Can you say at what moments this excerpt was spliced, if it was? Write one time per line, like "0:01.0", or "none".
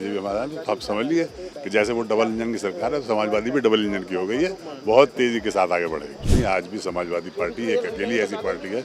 0:06.3